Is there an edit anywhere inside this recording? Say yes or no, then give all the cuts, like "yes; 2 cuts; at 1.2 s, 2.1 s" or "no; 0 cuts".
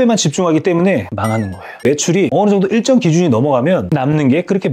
yes; 1 cut; at 1.8 s